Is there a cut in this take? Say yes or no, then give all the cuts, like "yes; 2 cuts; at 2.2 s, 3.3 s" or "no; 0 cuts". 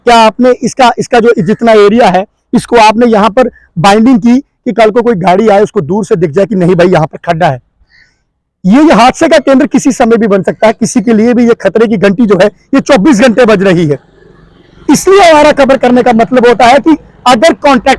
no; 0 cuts